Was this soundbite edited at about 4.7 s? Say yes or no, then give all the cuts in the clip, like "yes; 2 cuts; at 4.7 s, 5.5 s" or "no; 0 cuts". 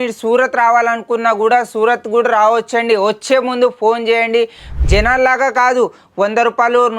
yes; 1 cut; at 4.7 s